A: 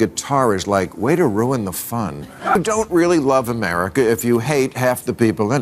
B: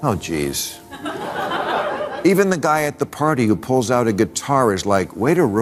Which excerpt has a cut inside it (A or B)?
A